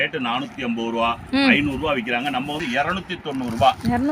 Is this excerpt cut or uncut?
cut